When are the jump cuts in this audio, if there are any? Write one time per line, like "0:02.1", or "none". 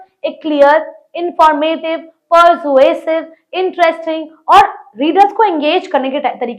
none